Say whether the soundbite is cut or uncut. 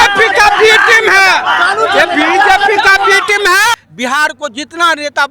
cut